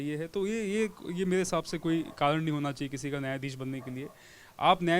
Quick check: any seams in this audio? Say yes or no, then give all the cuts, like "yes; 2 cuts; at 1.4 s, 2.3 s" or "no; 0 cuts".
no; 0 cuts